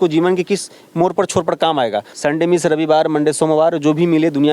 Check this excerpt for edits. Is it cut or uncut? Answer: cut